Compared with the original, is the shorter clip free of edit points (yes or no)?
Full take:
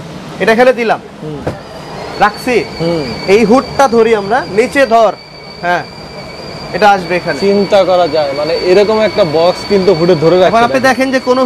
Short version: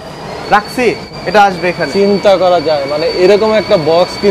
no